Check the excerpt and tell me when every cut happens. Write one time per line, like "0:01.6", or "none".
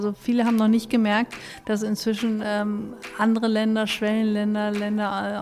none